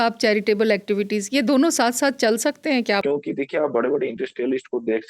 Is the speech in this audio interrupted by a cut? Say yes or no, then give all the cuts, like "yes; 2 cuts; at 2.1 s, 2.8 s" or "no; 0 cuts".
yes; 1 cut; at 3.0 s